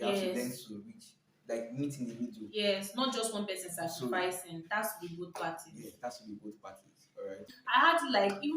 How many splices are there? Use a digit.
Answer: 1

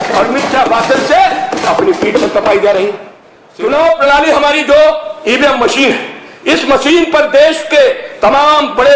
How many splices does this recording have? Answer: 1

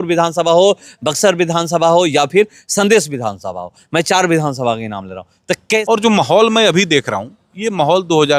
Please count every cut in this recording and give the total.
1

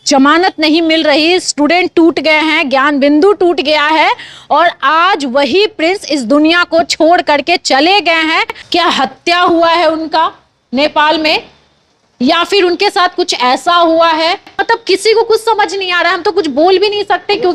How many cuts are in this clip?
2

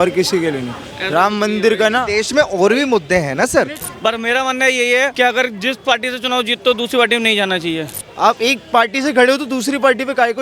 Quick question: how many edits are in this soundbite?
3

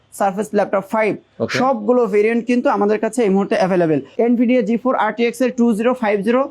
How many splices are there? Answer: 1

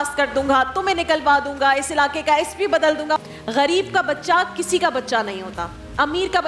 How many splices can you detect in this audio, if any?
1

